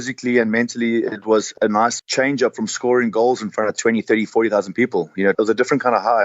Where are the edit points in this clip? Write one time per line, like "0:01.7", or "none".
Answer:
0:02.0
0:05.3